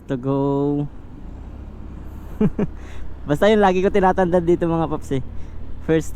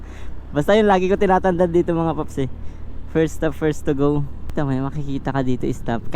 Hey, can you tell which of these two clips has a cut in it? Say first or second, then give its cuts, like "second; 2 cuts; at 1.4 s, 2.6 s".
second; 1 cut; at 4.4 s